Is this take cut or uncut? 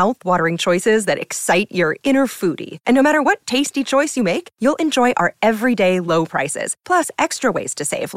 uncut